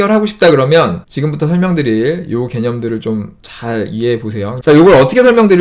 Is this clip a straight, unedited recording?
no; 1 cut; at 4.6 s

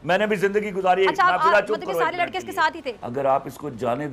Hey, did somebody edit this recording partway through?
yes; 1 cut; at 2.9 s

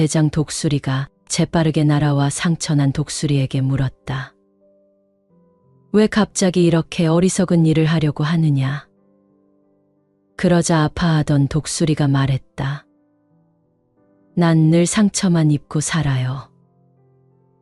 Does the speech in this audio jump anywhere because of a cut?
yes; 2 cuts; at 4.3 s, 5.9 s

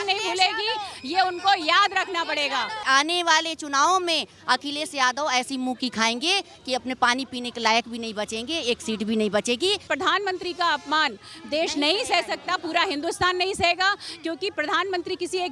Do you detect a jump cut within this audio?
yes; 2 cuts; at 2.8 s, 9.8 s

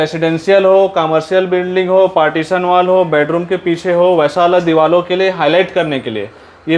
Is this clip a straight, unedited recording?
yes; 0 cuts

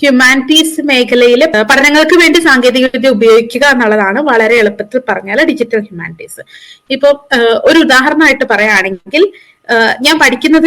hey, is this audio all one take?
yes; 0 cuts

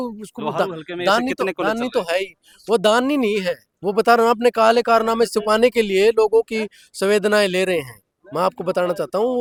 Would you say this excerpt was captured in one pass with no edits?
yes; 0 cuts

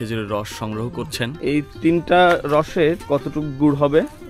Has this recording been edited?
yes; 2 cuts; at 1.2 s, 3.0 s

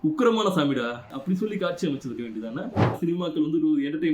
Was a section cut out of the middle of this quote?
yes; 1 cut; at 3.0 s

